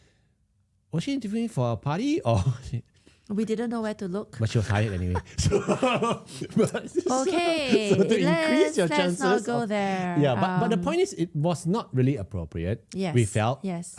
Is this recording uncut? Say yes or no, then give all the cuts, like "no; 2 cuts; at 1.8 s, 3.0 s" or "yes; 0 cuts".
yes; 0 cuts